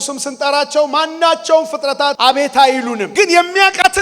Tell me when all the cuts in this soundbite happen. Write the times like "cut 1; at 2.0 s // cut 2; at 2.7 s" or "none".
cut 1; at 2.2 s // cut 2; at 3.0 s

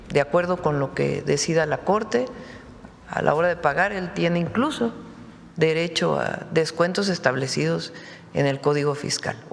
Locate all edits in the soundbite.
none

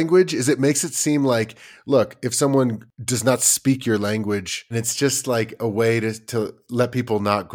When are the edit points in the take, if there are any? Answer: cut 1; at 2.9 s // cut 2; at 4.7 s

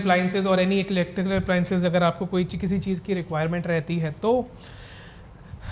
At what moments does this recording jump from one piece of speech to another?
none

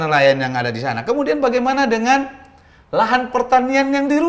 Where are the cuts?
none

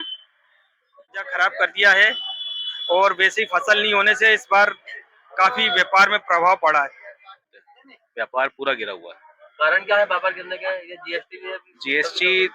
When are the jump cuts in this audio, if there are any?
cut 1; at 1.2 s // cut 2; at 7.4 s

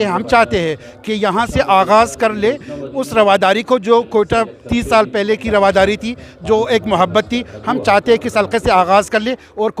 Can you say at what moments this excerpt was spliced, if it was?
none

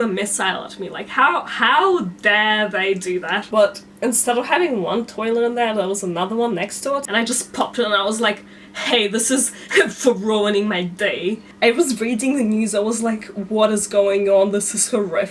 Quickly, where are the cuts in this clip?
cut 1; at 3.4 s // cut 2; at 7.1 s // cut 3; at 11.5 s

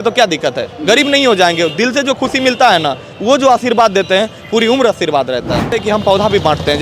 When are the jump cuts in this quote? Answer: cut 1; at 5.8 s

